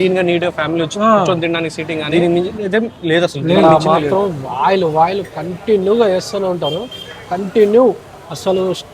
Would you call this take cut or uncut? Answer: cut